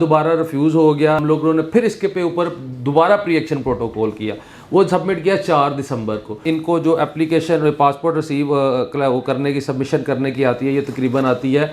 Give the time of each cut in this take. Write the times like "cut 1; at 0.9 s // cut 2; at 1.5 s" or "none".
cut 1; at 1.2 s // cut 2; at 6.4 s